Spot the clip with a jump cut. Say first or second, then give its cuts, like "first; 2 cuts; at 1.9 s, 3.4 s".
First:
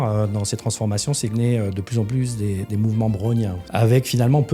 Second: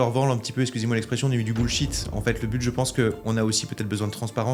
first; 2 cuts; at 1.3 s, 3.6 s